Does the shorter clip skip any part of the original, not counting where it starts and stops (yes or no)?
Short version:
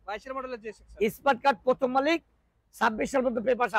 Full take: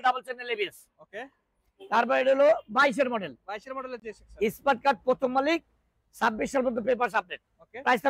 no